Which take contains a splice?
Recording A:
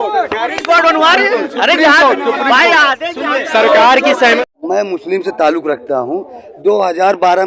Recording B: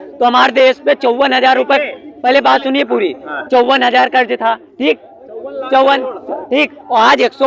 A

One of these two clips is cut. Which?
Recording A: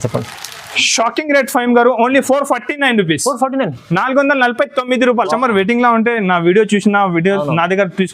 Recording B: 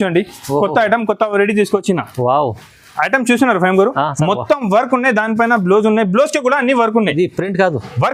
A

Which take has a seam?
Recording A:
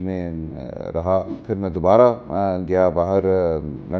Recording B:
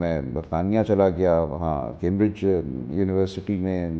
A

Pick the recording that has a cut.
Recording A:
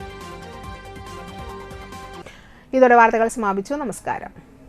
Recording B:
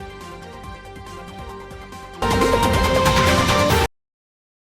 B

